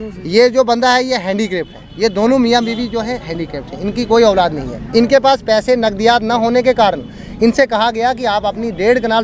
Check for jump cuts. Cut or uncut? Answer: uncut